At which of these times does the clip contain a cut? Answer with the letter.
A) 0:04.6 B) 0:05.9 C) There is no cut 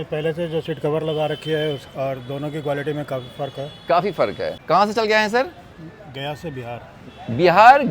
A